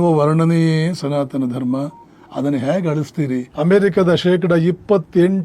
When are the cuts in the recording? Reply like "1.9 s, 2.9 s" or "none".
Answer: 3.5 s